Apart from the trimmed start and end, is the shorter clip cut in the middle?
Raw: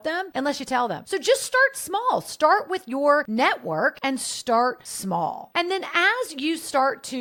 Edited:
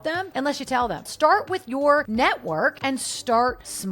yes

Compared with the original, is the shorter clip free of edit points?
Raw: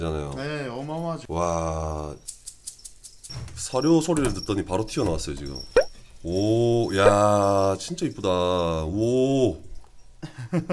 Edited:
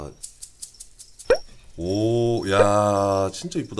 no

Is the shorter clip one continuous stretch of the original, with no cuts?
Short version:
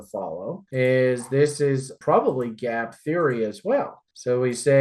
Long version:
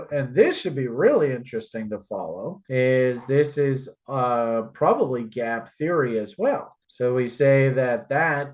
no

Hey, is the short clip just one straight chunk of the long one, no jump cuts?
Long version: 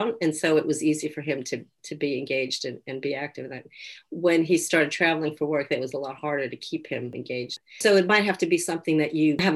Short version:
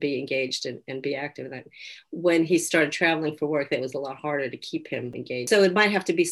no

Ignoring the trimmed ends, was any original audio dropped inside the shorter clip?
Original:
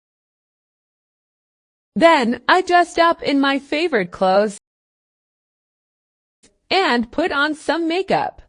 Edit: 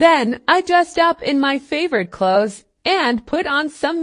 yes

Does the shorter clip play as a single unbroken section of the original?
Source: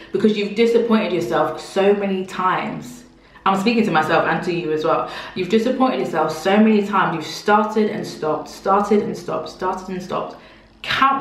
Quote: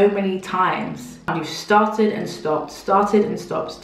no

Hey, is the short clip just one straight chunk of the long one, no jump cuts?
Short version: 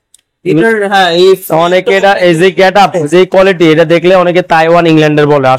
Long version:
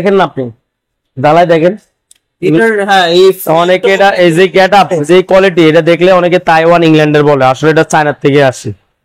yes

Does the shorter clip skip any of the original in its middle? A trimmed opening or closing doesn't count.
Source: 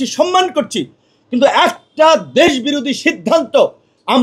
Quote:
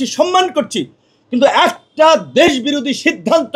no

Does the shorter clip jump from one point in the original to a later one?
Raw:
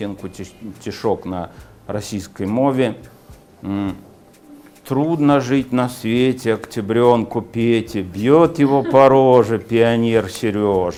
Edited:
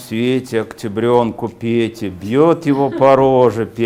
no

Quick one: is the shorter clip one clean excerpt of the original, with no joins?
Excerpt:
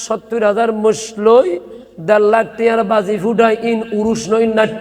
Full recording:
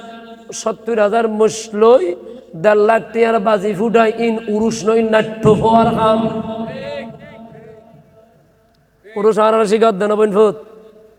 yes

